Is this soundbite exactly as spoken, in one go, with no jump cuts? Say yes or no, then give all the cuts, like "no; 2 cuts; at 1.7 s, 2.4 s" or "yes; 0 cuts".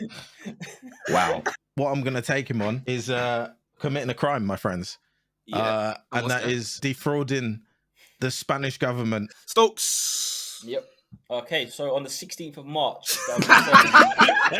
no; 4 cuts; at 1.6 s, 2.8 s, 6.7 s, 9.4 s